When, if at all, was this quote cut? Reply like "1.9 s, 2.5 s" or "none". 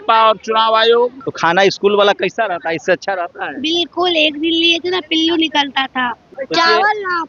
1.2 s, 6.3 s